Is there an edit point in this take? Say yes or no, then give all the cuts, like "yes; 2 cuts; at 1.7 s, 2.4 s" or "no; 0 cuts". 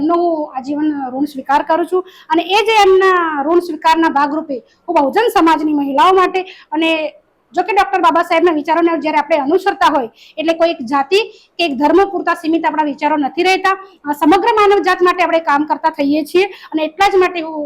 no; 0 cuts